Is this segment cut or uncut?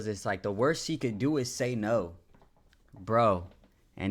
uncut